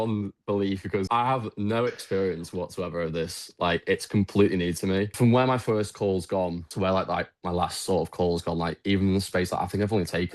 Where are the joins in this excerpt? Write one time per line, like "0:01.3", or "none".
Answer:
0:01.0
0:05.1